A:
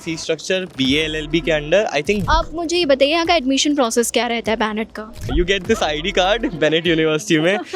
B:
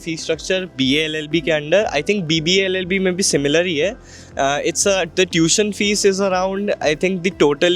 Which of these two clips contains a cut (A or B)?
A